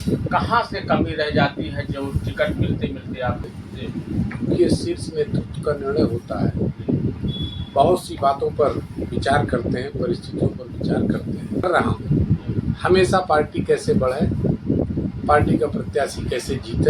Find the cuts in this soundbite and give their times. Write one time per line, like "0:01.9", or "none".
0:03.5
0:11.6